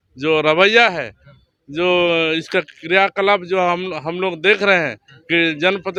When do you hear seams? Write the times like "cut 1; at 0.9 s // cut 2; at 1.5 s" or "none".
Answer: none

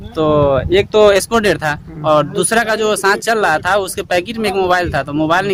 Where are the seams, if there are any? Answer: none

